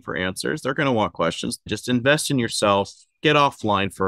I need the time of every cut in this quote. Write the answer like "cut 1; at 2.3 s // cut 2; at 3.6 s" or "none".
cut 1; at 1.7 s